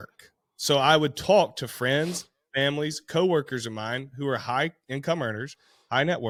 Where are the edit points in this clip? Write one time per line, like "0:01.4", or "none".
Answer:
none